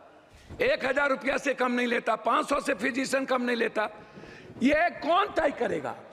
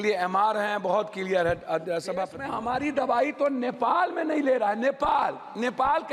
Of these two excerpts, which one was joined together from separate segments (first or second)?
second